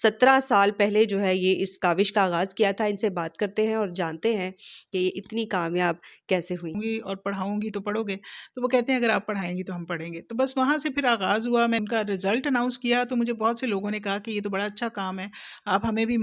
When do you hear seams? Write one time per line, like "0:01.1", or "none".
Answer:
0:06.7
0:11.8